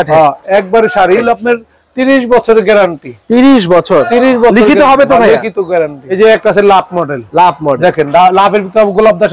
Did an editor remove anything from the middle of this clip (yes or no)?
yes